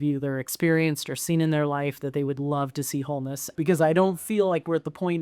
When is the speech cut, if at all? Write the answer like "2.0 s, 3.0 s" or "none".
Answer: 3.5 s